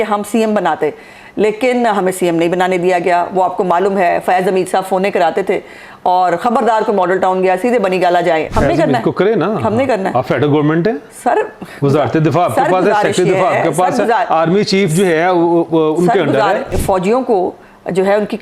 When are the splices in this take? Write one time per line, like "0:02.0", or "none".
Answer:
0:08.5
0:16.7